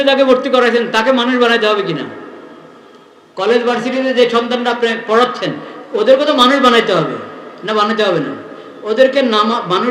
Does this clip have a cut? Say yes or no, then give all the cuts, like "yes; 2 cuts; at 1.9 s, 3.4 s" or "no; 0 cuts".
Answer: no; 0 cuts